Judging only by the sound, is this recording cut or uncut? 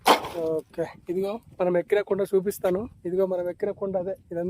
uncut